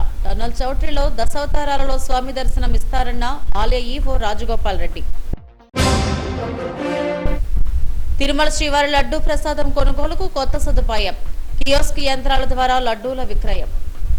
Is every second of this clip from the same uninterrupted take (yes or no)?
yes